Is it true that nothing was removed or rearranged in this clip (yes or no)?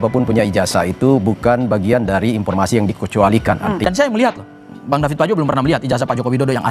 no